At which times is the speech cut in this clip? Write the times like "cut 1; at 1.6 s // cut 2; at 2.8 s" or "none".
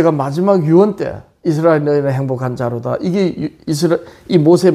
none